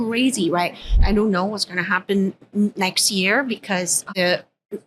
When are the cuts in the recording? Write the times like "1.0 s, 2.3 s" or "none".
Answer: 1.0 s, 4.1 s